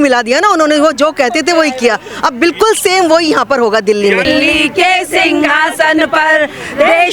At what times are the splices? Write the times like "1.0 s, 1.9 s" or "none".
4.2 s